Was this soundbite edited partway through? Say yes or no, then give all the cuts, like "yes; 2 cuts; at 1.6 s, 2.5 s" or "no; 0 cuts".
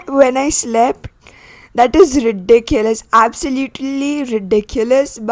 no; 0 cuts